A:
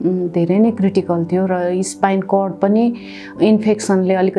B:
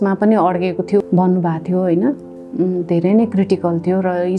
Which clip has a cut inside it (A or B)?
B